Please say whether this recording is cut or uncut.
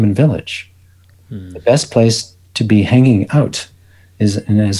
uncut